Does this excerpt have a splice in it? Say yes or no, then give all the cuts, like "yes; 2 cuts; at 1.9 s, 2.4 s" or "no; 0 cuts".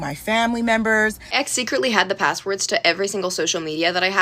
yes; 1 cut; at 1.3 s